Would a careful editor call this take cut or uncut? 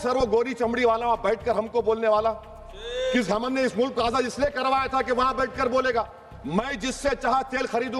uncut